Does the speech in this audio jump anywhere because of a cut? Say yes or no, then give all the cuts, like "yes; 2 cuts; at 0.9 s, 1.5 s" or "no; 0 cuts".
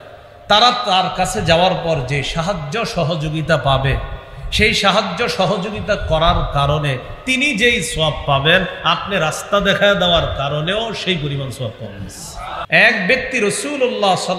yes; 1 cut; at 12.6 s